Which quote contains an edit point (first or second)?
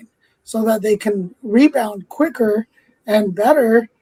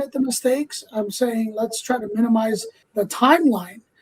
second